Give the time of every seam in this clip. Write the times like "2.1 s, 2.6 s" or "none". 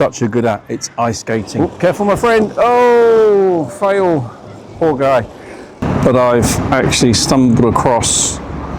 1.5 s, 5.8 s